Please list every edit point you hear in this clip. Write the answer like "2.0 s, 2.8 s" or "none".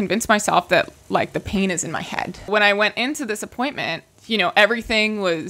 2.5 s, 4.1 s